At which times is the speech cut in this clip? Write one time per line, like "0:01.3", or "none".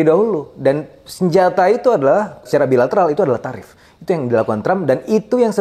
0:02.4